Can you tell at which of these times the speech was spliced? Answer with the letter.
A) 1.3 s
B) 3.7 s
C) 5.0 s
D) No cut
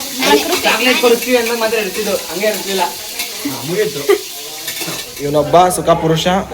C